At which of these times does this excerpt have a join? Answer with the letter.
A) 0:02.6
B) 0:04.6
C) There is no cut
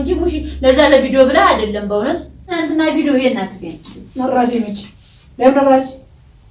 A